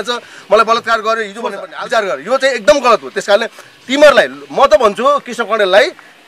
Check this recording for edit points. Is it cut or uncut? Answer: cut